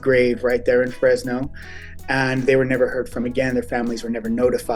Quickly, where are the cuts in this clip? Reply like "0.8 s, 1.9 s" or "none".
none